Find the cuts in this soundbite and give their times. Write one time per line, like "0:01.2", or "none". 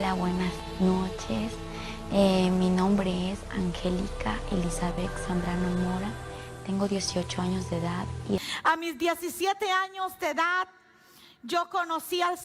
0:08.5